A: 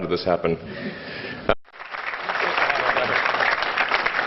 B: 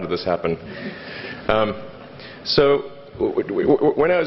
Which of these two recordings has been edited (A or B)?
B